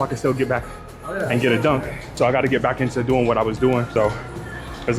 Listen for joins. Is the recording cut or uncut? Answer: cut